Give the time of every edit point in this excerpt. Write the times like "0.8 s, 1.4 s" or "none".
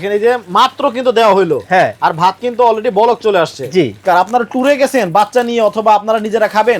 4.0 s